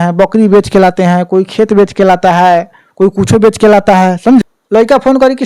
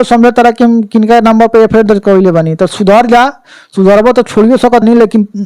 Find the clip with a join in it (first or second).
first